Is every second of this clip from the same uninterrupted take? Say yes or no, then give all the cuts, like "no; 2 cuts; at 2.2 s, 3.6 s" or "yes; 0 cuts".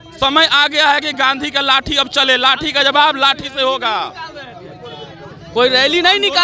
yes; 0 cuts